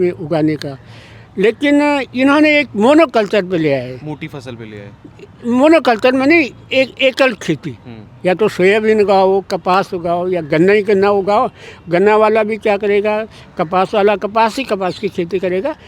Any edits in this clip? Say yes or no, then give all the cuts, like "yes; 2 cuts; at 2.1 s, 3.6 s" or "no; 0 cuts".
no; 0 cuts